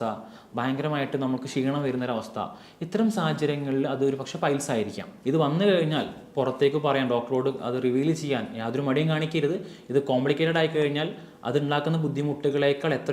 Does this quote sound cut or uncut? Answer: cut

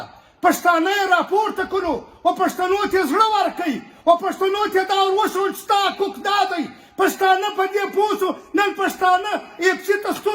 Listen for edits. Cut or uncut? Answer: uncut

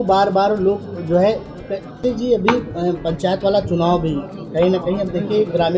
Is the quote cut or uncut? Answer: cut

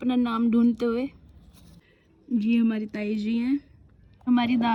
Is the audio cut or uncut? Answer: uncut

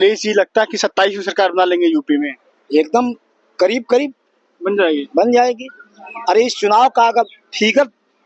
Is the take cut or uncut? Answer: uncut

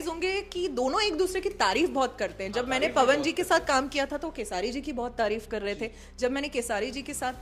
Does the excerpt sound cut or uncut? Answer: uncut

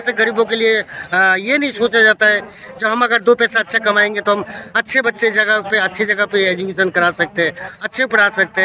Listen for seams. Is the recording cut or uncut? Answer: uncut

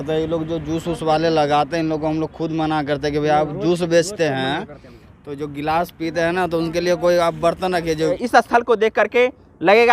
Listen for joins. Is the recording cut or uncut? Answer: cut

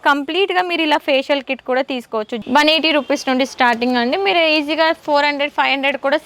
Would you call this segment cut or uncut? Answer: cut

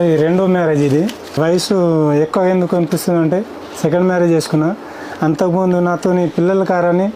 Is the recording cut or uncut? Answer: cut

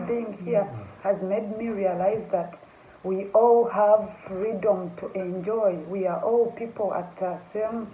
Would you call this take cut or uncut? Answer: uncut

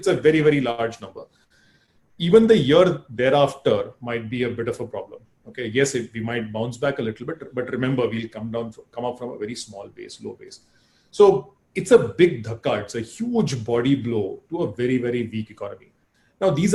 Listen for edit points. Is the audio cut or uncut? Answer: uncut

